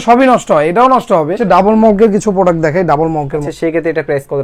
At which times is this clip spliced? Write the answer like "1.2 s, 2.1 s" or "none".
1.4 s, 3.5 s